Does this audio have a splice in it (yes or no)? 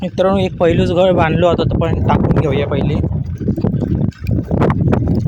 no